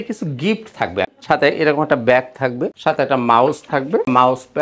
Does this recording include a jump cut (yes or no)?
yes